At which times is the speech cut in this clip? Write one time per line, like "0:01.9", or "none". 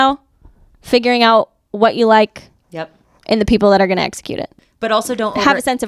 0:04.7